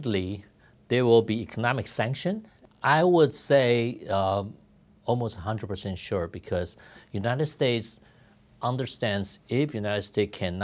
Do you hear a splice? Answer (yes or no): yes